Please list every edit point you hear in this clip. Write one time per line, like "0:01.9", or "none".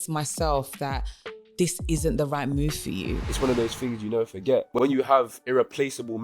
0:03.2
0:04.7